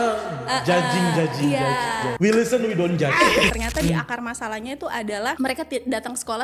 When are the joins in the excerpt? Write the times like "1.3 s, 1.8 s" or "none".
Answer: 2.0 s, 3.5 s, 5.4 s